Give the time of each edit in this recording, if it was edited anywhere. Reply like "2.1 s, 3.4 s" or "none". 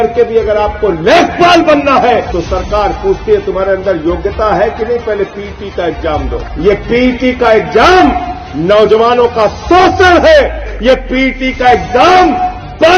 2.3 s, 6.4 s, 10.7 s